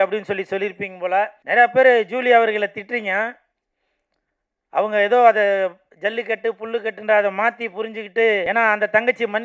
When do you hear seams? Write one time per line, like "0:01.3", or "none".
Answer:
0:01.4
0:08.4